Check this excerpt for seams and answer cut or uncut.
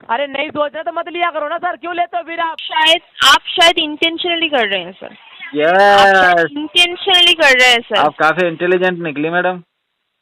cut